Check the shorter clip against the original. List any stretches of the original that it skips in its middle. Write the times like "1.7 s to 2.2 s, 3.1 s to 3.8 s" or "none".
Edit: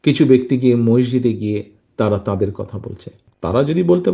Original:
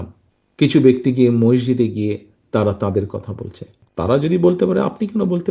none